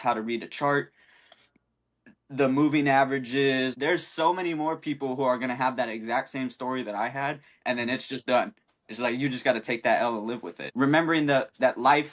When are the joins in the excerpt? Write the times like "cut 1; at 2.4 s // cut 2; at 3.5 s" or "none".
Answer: cut 1; at 3.8 s // cut 2; at 10.6 s